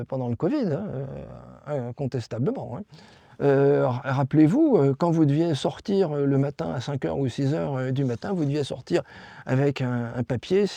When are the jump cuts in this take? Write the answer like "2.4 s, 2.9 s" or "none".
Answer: none